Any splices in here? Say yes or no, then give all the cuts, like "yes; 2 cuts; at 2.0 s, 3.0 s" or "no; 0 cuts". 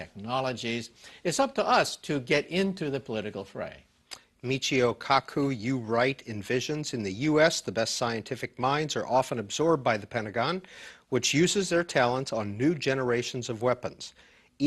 yes; 1 cut; at 1.2 s